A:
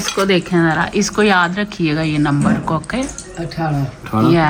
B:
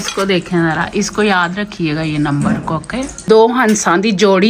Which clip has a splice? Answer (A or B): B